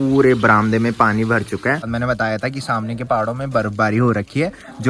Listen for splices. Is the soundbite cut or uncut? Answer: cut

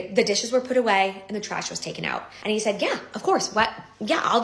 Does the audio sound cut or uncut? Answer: cut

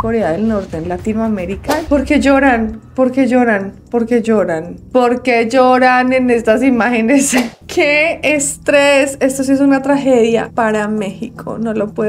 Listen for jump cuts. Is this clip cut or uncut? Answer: cut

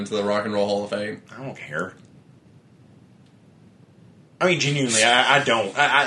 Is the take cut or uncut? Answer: uncut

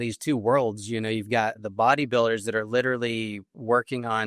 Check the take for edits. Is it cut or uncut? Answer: cut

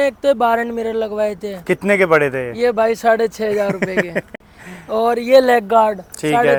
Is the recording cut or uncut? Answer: uncut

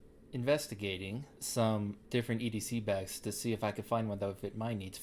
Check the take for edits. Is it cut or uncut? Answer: cut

